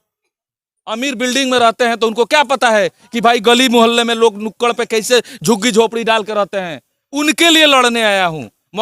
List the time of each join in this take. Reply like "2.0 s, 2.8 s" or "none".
none

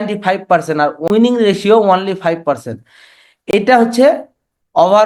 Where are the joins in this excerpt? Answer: 1.0 s

